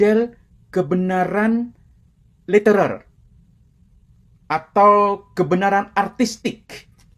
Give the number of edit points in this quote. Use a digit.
0